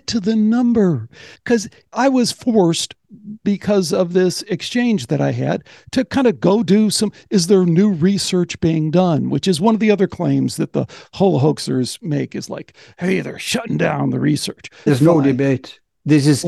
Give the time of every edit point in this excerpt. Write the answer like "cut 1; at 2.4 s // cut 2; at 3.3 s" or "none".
cut 1; at 1.4 s // cut 2; at 14.8 s